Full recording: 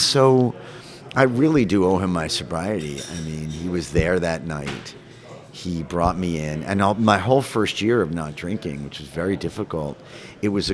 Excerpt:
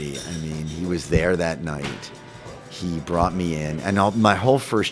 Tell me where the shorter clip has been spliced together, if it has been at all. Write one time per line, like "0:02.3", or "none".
none